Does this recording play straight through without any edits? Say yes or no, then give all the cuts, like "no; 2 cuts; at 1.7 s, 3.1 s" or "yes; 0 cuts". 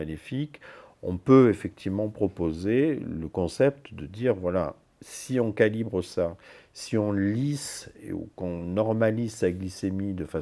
yes; 0 cuts